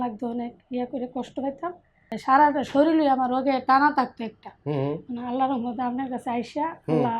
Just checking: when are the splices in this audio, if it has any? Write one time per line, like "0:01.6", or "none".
0:02.2